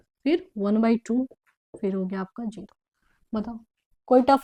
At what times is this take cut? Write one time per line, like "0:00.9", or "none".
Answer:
none